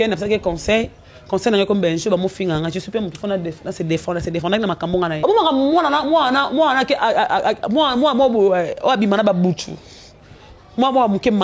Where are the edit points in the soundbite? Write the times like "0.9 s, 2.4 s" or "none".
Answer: 5.1 s